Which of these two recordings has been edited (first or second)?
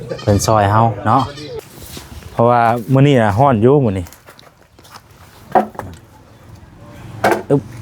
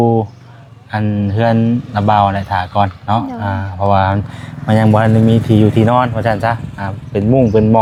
first